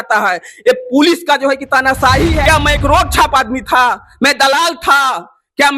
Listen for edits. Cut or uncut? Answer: cut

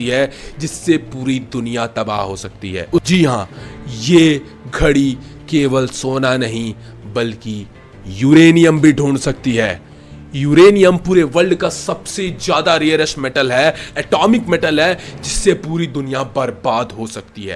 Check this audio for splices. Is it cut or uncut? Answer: uncut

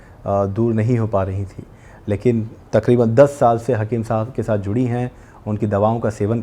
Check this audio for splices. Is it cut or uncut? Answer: uncut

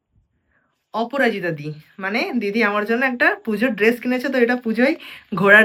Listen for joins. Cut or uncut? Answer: uncut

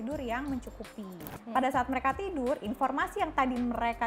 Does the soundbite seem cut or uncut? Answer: cut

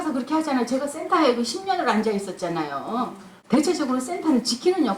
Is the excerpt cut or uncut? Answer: cut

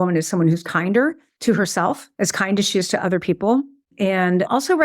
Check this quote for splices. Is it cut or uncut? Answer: cut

